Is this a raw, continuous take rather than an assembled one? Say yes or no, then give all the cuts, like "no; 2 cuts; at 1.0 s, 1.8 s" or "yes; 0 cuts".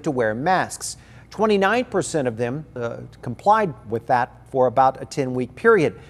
no; 1 cut; at 2.8 s